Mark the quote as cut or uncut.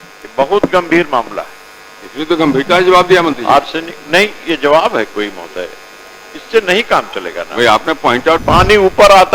cut